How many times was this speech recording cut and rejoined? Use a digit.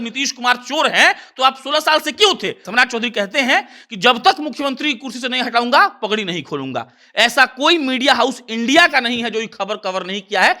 1